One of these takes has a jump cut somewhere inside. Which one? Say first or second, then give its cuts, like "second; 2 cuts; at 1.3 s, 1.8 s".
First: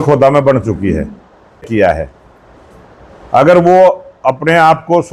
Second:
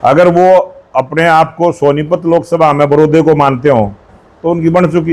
first; 1 cut; at 1.7 s